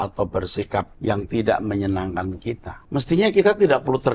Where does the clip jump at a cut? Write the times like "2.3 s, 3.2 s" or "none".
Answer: 0.9 s, 2.7 s